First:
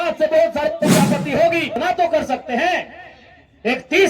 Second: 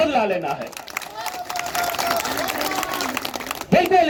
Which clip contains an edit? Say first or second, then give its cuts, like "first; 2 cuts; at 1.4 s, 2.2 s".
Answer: first; 1 cut; at 1.7 s